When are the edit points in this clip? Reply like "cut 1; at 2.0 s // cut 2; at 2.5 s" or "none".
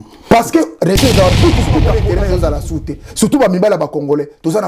cut 1; at 2.0 s